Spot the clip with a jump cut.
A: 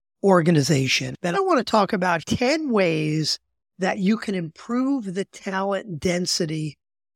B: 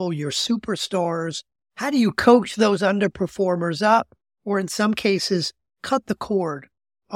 A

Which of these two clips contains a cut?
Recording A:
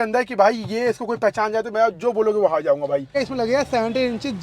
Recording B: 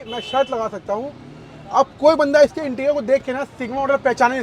A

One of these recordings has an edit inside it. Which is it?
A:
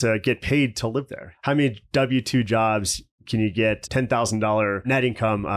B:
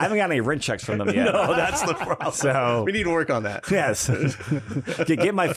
A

